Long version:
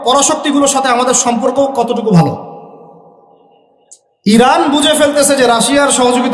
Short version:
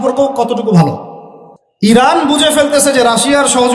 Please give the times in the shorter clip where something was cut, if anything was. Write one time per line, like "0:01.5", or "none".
0:01.9

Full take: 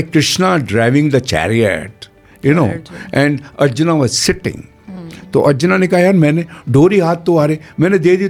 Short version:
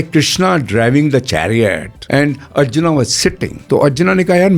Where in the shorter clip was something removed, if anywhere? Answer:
0:01.9
0:03.5

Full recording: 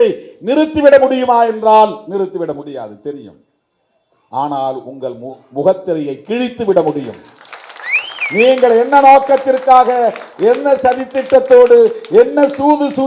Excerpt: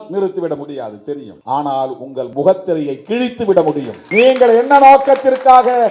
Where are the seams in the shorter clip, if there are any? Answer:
0:01.3
0:02.3
0:04.0

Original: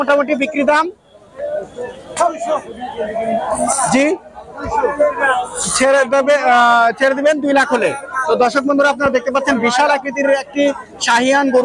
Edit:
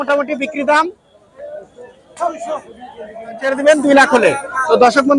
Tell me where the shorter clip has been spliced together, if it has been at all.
0:03.5

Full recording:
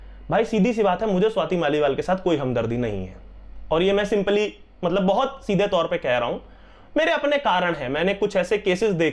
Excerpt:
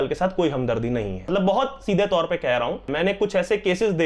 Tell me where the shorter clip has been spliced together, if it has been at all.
0:01.3
0:02.9

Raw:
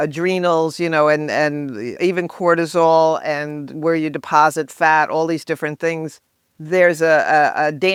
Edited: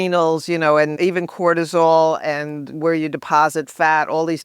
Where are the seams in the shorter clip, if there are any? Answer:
0:00.9

